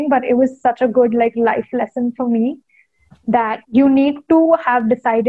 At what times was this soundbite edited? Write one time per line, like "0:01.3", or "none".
0:03.6